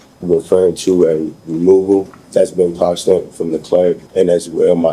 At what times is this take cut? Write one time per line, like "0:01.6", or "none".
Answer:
0:02.2
0:04.0